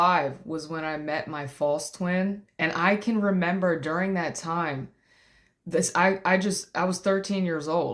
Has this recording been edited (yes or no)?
no